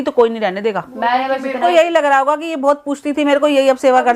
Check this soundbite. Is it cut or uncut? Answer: cut